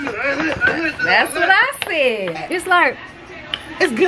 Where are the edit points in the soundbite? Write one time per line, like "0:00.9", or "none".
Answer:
0:02.4